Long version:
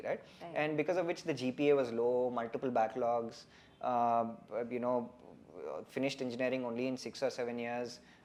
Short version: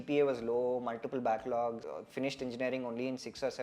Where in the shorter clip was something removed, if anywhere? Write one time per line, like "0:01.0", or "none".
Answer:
0:01.9